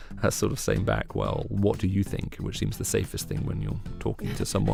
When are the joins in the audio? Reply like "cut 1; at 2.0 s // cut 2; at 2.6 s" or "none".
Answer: none